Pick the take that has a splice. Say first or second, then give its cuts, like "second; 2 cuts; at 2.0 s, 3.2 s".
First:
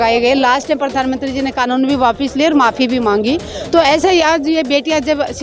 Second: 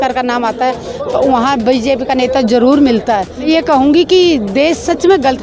second; 1 cut; at 3.3 s